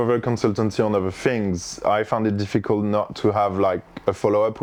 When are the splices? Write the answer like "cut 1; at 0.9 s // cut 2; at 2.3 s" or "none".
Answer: none